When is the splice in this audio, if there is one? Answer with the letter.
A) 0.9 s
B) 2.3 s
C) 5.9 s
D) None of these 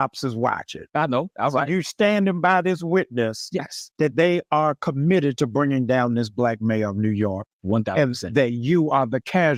D